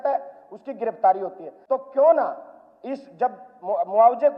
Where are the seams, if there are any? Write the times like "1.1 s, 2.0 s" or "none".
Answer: 1.5 s